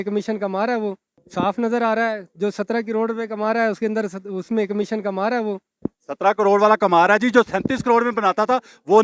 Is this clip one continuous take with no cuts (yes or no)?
yes